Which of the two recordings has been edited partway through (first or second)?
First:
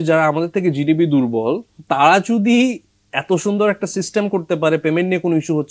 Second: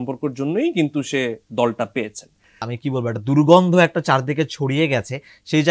second